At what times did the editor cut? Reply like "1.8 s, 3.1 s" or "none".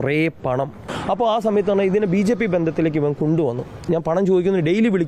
0.9 s, 3.8 s